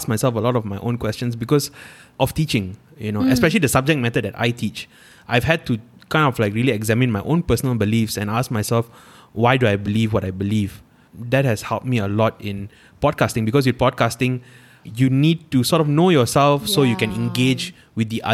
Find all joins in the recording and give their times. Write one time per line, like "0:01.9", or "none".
0:02.1
0:11.0
0:14.8